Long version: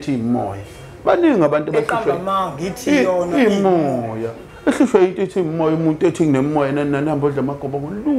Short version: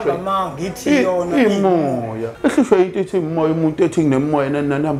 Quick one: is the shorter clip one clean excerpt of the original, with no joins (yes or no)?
no